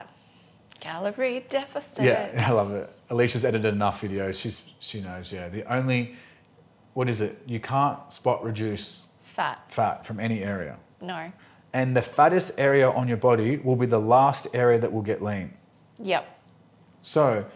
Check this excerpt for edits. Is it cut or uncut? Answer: uncut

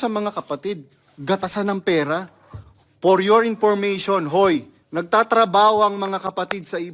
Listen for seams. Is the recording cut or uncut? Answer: cut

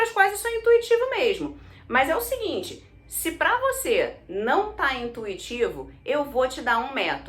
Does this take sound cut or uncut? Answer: uncut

